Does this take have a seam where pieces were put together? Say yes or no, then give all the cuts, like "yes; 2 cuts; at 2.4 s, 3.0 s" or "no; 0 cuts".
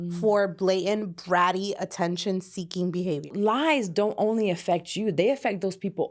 yes; 1 cut; at 3.3 s